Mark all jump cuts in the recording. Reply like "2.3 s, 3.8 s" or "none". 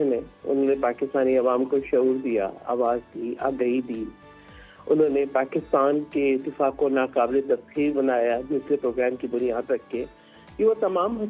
none